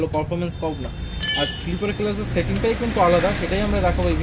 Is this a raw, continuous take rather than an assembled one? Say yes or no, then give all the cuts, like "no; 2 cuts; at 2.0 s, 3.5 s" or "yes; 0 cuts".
yes; 0 cuts